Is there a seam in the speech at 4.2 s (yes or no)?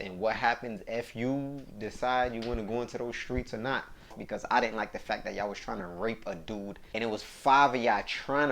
yes